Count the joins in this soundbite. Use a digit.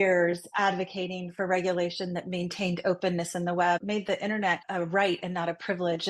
1